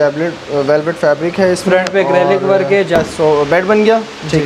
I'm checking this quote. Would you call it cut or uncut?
cut